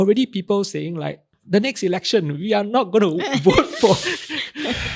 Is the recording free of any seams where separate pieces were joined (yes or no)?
yes